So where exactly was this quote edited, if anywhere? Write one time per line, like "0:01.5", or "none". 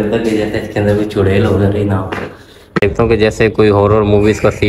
0:02.8